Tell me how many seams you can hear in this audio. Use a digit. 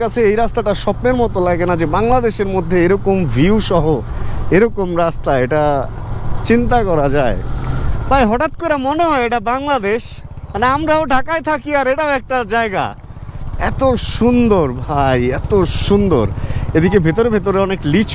0